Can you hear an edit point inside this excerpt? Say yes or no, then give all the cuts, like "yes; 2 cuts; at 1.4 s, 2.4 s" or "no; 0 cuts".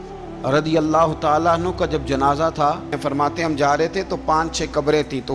yes; 1 cut; at 3.0 s